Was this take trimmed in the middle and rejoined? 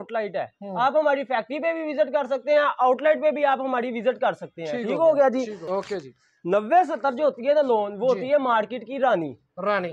yes; 1 cut; at 5.6 s

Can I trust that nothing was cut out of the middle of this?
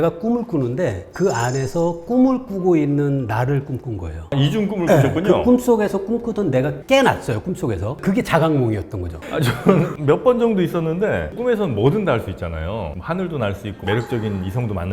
no; 3 cuts; at 4.3 s, 11.3 s, 13.7 s

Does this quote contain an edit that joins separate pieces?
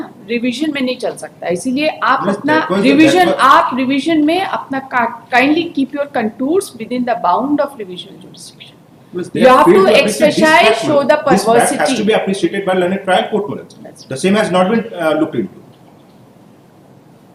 no; 0 cuts

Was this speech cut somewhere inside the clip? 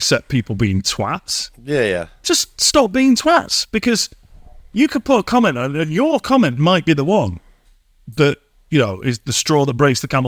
no; 0 cuts

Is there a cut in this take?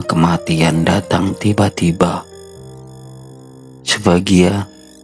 no; 0 cuts

